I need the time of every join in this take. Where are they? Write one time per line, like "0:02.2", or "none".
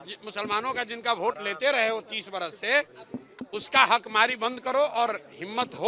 none